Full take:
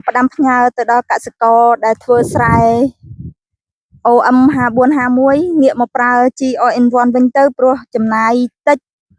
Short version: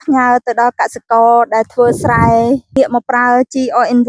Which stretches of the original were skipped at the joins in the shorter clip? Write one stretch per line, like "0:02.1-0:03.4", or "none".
0:03.1-0:05.6